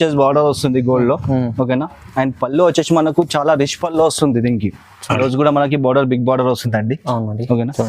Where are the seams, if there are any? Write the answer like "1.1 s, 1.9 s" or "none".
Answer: 5.2 s